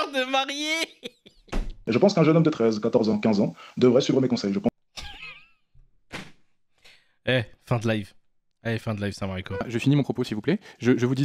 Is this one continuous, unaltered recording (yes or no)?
no